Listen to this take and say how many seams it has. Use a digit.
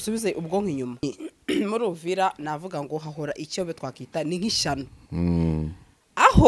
1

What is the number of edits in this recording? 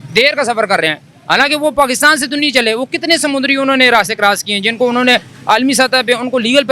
0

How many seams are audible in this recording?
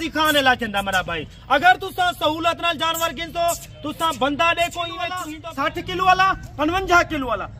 1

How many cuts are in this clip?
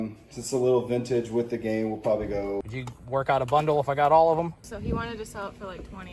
2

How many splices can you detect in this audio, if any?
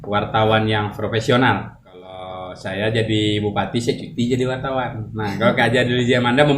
1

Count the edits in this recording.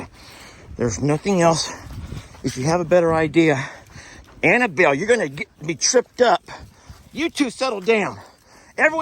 0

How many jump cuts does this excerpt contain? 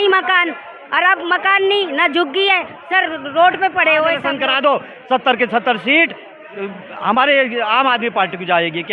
1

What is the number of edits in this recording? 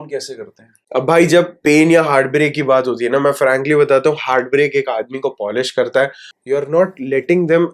1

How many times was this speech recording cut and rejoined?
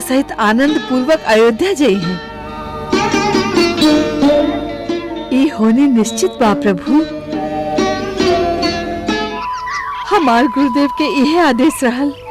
1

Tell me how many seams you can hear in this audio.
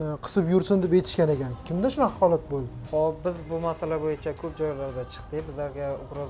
1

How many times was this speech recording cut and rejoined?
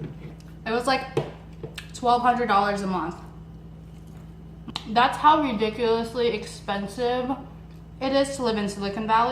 1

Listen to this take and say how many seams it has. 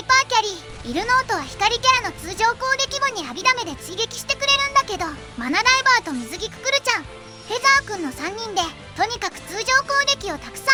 0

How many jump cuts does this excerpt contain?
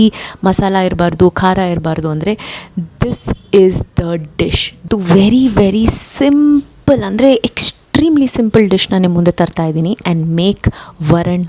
2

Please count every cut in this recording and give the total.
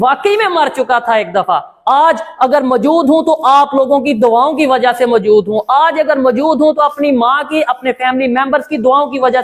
0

